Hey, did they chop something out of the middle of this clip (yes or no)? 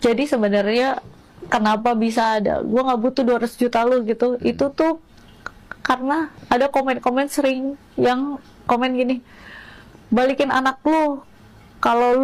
no